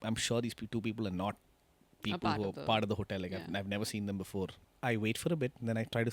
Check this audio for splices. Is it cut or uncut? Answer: cut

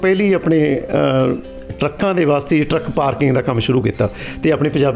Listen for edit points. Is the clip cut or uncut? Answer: uncut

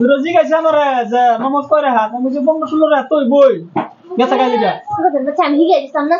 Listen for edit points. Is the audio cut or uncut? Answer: uncut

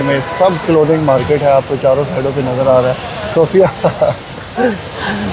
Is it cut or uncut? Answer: uncut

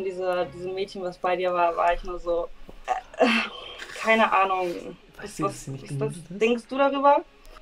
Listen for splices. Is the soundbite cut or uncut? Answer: uncut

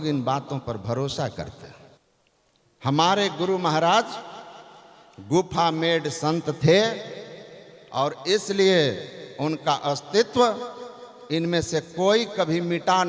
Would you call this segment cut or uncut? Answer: uncut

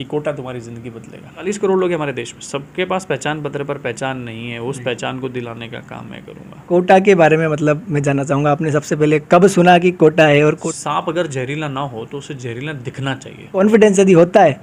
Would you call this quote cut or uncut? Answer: cut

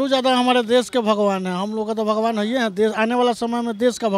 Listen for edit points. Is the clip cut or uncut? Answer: uncut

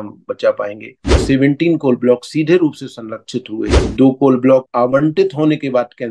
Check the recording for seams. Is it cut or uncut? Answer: cut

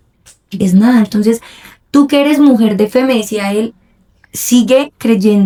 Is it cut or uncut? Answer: uncut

